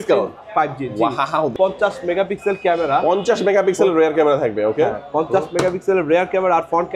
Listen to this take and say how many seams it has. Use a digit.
1